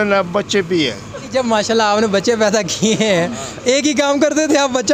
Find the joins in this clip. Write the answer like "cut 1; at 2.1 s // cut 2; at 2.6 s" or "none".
cut 1; at 1.3 s